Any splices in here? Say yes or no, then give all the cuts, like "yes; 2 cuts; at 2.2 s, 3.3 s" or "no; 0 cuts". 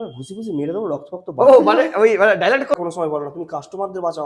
yes; 1 cut; at 2.7 s